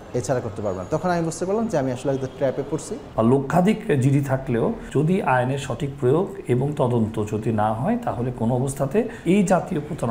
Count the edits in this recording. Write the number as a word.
two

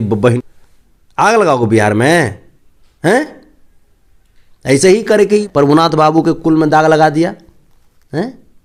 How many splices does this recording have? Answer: zero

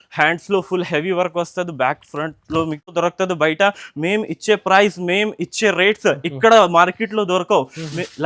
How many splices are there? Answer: one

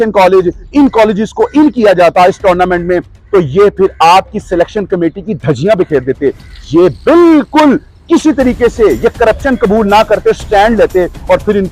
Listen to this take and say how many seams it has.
zero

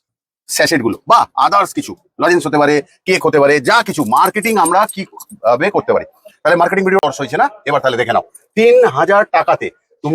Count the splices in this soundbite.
one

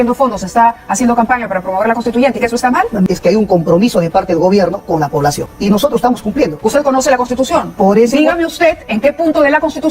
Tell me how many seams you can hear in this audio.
three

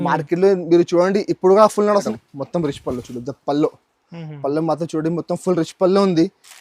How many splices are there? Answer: one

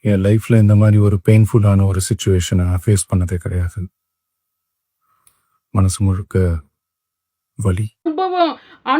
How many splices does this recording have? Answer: one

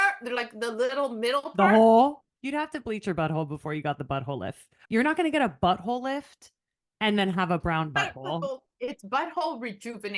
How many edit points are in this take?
three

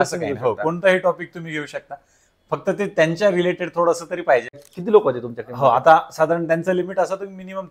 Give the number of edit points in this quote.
one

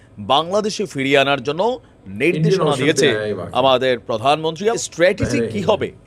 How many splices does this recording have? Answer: one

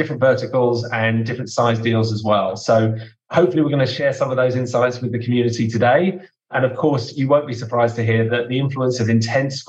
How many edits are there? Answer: one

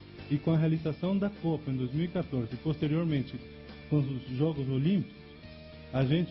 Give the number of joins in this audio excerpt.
one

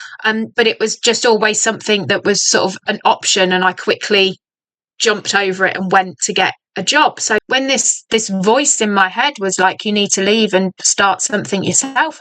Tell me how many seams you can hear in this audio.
one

